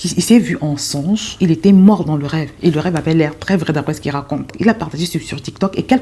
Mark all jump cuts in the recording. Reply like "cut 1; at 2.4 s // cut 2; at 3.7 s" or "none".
cut 1; at 1.3 s // cut 2; at 4.5 s